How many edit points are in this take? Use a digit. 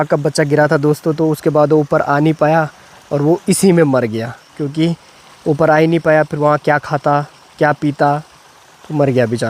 0